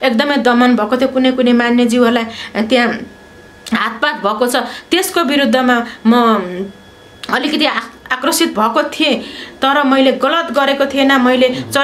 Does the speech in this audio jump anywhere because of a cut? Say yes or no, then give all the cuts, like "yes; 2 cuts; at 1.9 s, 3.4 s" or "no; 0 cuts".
no; 0 cuts